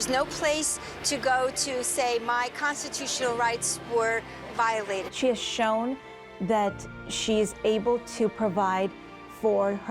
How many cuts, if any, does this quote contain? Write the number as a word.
one